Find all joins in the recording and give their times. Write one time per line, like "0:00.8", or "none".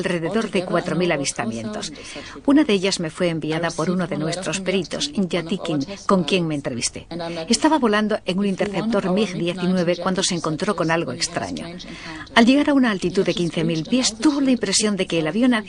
0:14.1